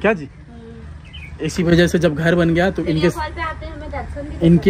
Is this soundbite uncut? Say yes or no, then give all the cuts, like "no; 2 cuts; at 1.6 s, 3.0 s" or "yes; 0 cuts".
yes; 0 cuts